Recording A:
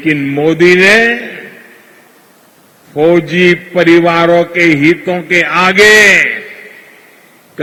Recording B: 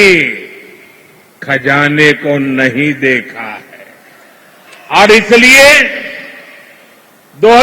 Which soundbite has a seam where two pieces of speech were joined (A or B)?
B